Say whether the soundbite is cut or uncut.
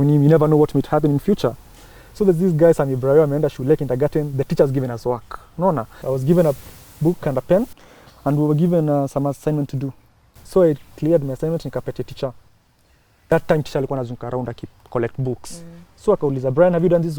cut